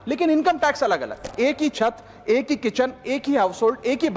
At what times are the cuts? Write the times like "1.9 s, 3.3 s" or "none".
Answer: 1.3 s

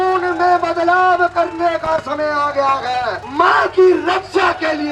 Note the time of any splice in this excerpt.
3.2 s

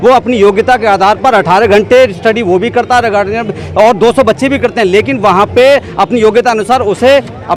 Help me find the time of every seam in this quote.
none

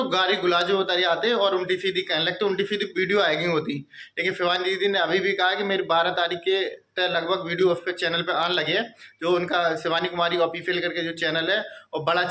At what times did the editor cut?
none

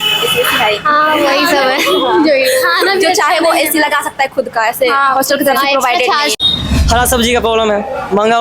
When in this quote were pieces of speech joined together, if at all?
6.3 s

